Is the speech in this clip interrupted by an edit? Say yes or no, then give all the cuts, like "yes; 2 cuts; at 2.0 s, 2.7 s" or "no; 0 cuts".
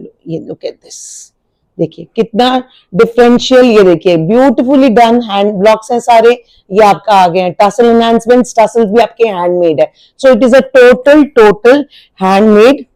no; 0 cuts